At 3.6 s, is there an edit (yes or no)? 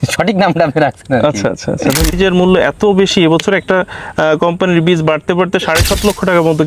no